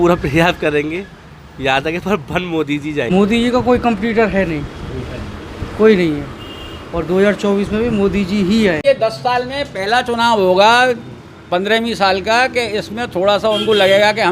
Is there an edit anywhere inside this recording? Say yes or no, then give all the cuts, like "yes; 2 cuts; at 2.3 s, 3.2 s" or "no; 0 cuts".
yes; 2 cuts; at 3.1 s, 8.8 s